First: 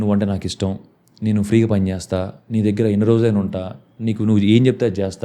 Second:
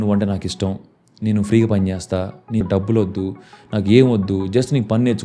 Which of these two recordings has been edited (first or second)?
second